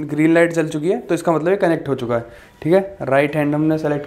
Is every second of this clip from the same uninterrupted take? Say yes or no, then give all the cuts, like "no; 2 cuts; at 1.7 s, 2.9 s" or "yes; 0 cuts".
yes; 0 cuts